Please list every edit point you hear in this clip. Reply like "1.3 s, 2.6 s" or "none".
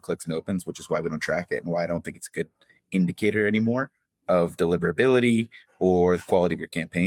none